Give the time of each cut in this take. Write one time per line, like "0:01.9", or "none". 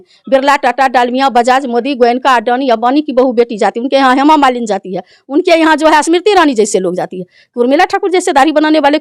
none